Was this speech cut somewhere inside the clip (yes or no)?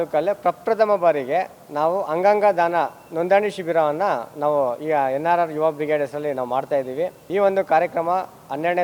yes